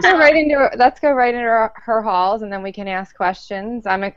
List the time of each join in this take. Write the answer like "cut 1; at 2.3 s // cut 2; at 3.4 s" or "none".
cut 1; at 2.3 s